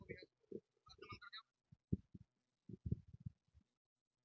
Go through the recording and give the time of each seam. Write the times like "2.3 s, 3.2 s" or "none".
none